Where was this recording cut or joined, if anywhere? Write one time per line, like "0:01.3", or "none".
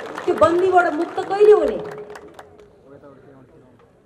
none

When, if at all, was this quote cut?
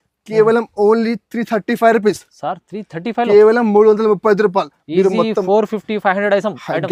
none

